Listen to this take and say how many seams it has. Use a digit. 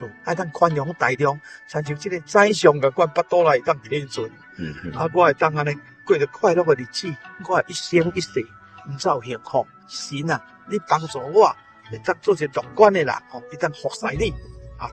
1